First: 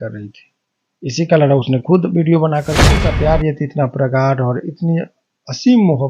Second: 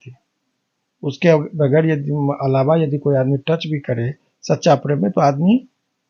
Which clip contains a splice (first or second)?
first